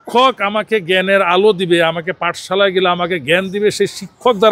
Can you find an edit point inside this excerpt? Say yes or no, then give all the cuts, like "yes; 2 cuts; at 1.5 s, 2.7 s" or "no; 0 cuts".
no; 0 cuts